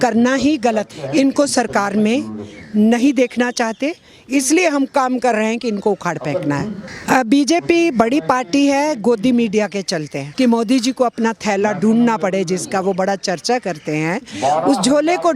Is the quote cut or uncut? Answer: cut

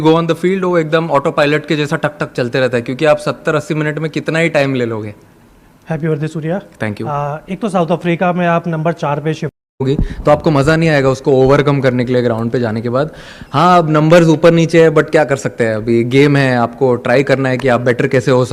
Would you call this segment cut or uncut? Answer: uncut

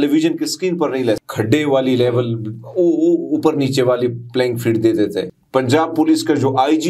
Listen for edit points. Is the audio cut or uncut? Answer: cut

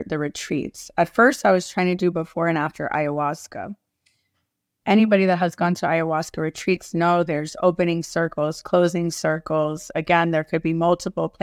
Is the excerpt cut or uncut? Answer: uncut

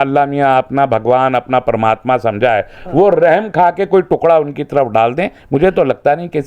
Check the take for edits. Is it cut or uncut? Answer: uncut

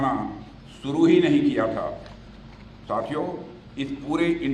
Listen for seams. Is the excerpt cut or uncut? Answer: uncut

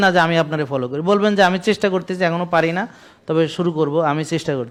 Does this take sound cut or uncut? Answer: uncut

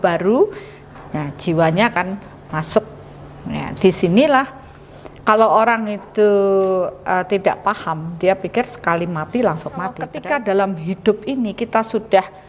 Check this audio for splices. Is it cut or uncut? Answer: cut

